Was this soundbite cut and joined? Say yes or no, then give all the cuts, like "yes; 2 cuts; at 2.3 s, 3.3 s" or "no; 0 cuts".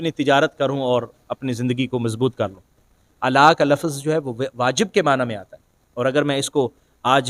yes; 1 cut; at 3.1 s